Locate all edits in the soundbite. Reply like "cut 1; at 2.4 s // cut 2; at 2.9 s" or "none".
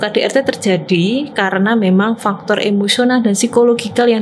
none